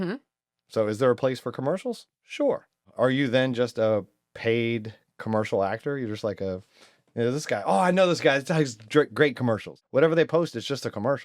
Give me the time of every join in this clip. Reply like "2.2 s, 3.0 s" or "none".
2.9 s, 9.8 s